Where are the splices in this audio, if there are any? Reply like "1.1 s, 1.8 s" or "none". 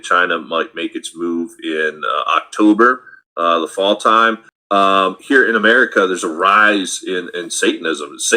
4.5 s